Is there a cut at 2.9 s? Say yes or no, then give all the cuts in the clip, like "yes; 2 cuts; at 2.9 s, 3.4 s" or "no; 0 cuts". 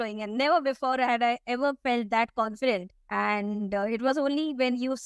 no; 0 cuts